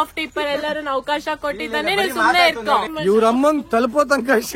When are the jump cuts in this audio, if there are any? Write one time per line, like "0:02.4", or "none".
0:02.9